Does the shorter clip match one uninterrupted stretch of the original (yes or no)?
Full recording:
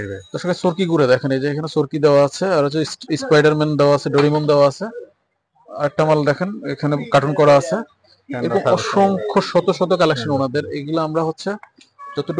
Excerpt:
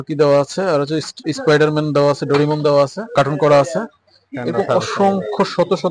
no